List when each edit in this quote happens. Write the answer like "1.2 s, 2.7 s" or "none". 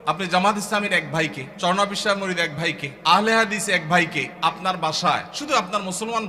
1.4 s, 2.9 s, 4.3 s, 5.3 s